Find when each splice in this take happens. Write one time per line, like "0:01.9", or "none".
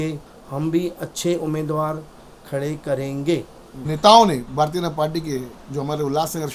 0:03.8